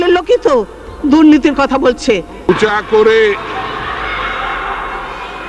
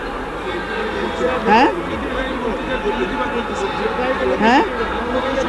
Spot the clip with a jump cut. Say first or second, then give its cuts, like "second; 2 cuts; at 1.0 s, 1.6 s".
first; 1 cut; at 2.5 s